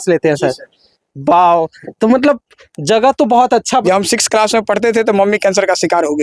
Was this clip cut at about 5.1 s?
no; 1 cut; at 3.8 s

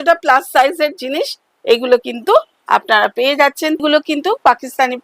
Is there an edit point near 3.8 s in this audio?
yes; 1 cut; at 3.8 s

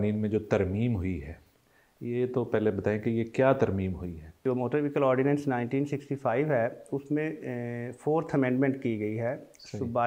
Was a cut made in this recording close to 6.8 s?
no; 1 cut; at 4.4 s

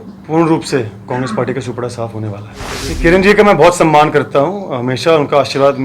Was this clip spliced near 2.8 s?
yes; 1 cut; at 2.8 s

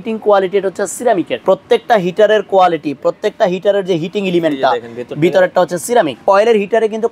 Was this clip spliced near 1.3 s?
yes; 2 cuts; at 1.3 s, 6.2 s

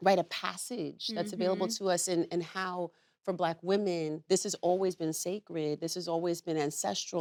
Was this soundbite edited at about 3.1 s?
no; 0 cuts

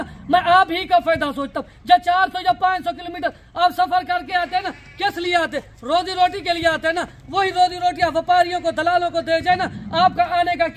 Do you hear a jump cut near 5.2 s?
no; 0 cuts

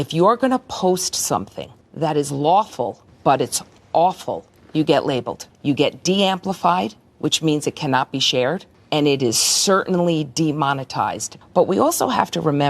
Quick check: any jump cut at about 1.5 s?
no; 2 cuts; at 5.5 s, 11.3 s

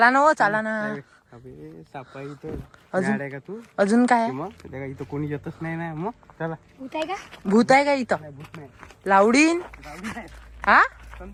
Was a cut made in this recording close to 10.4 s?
no; 0 cuts

